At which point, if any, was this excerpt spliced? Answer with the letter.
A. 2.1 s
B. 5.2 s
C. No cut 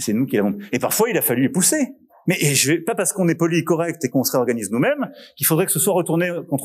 A